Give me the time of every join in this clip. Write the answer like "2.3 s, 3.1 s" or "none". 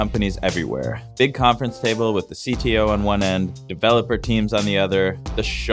3.6 s